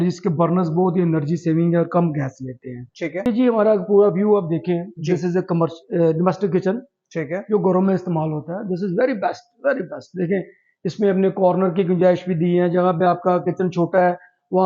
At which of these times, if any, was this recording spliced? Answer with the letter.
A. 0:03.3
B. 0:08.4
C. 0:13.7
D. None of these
A